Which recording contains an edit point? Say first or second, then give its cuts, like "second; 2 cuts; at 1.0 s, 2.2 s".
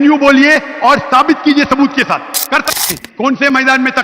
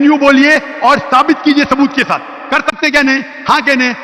first; 1 cut; at 2.7 s